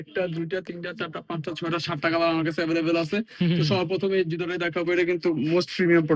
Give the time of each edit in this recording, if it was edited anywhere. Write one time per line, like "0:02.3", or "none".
none